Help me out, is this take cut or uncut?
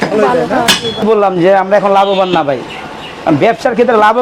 cut